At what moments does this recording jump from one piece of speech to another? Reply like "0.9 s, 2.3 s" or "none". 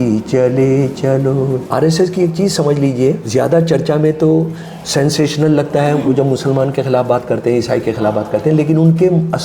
1.6 s, 3.2 s